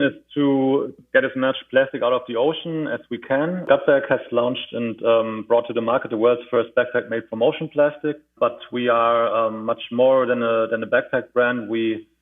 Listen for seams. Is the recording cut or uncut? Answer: cut